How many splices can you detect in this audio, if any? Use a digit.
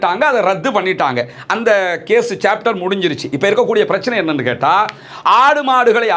0